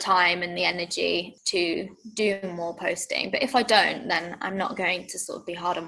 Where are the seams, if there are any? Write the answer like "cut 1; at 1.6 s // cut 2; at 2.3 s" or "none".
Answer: cut 1; at 1.3 s